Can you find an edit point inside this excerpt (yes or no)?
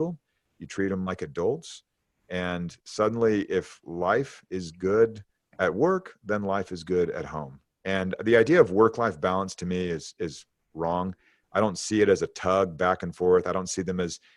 no